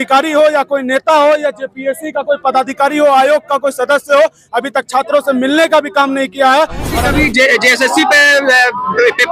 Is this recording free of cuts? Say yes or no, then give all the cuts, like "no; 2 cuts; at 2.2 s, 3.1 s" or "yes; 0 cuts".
no; 1 cut; at 7.0 s